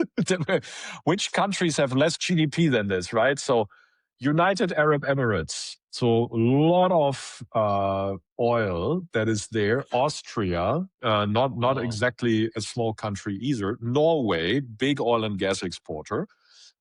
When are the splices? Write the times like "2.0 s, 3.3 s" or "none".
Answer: none